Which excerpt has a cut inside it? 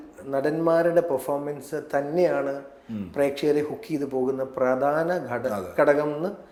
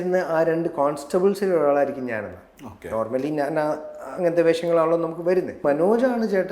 second; 1 cut; at 5.6 s

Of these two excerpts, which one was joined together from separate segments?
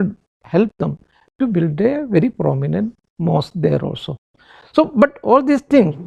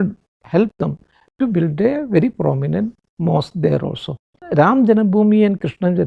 second; 1 cut; at 4.4 s

